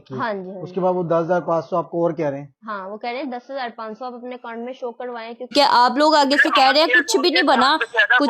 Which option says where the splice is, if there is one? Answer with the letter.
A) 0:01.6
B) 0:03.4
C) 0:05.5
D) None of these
C